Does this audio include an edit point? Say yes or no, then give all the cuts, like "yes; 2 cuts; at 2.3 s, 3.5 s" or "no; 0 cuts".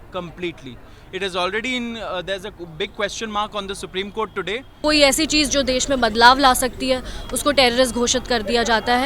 yes; 1 cut; at 4.7 s